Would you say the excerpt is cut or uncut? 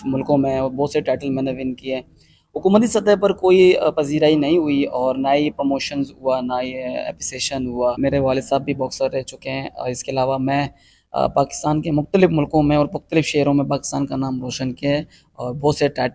cut